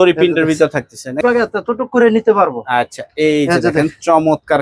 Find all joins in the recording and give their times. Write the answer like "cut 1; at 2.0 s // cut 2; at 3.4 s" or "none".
cut 1; at 1.2 s